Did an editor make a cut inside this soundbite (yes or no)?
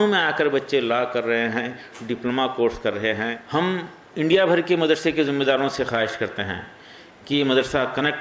yes